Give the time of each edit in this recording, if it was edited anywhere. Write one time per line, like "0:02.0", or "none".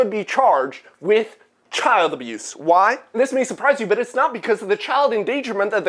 none